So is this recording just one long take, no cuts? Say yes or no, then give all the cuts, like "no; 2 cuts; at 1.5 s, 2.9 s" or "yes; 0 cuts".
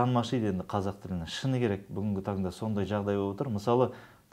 yes; 0 cuts